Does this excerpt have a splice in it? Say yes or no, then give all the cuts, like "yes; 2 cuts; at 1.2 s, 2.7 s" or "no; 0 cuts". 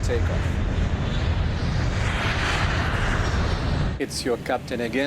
yes; 1 cut; at 3.9 s